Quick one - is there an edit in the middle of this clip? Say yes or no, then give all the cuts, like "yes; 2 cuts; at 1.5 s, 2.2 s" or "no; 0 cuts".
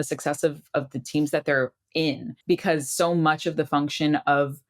yes; 1 cut; at 2.3 s